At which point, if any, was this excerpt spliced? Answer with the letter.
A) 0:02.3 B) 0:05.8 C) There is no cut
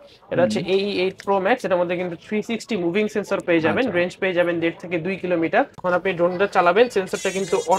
B